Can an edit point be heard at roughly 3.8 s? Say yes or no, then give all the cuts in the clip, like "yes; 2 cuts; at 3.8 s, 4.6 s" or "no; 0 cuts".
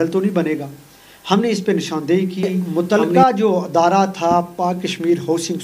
no; 1 cut; at 2.6 s